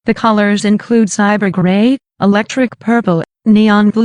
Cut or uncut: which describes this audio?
uncut